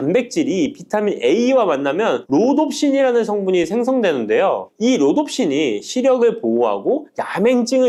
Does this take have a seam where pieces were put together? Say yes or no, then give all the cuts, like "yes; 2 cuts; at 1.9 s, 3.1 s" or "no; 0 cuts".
no; 0 cuts